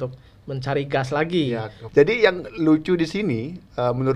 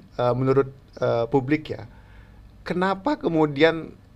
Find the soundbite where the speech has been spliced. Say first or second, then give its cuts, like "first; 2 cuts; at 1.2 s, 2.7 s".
first; 1 cut; at 1.8 s